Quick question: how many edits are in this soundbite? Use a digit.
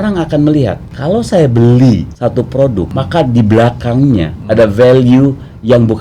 2